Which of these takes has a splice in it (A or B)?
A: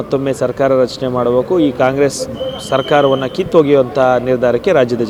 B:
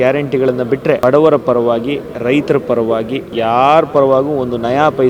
B